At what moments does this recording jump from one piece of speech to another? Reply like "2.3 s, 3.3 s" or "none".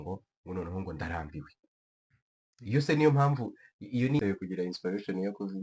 4.2 s